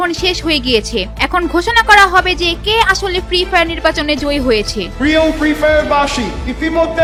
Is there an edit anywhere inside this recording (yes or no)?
no